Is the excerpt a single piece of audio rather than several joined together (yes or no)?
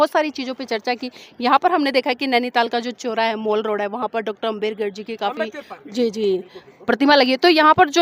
yes